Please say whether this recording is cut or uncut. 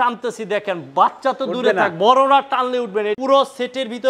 cut